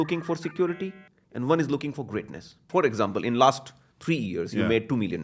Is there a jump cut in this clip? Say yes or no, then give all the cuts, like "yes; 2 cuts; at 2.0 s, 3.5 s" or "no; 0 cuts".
yes; 1 cut; at 2.6 s